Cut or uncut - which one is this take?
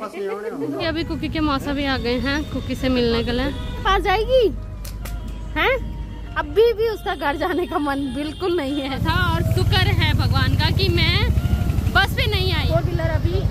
cut